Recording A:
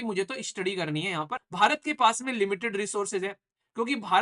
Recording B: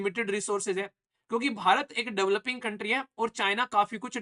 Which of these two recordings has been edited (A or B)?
A